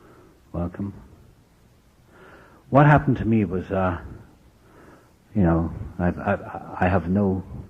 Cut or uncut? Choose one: cut